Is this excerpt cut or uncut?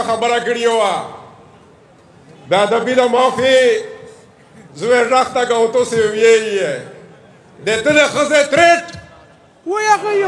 uncut